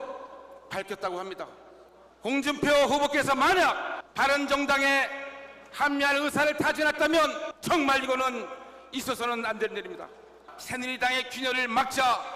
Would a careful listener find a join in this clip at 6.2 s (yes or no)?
yes